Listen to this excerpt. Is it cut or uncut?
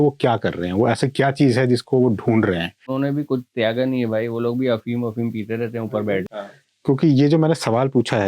cut